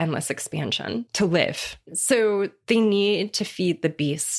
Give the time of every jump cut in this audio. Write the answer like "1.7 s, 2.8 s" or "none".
1.1 s, 1.9 s